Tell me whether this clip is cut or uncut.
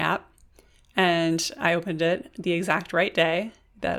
uncut